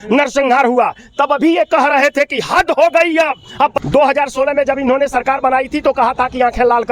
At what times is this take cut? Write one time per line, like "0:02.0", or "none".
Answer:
0:03.7